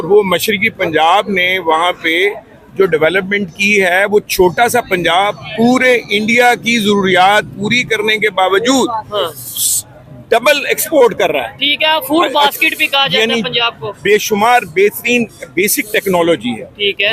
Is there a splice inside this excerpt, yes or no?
no